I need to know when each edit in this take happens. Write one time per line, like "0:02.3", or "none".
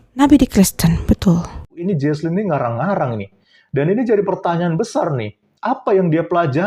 0:01.8